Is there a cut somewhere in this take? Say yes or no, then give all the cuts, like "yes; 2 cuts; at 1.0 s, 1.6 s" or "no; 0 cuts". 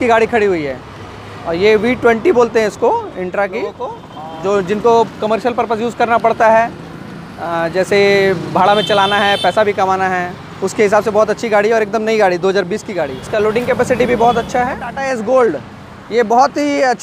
yes; 3 cuts; at 4.0 s, 13.2 s, 14.9 s